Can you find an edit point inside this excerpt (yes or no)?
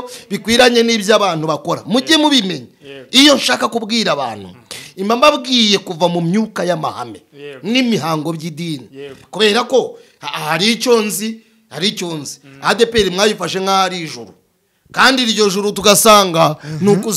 no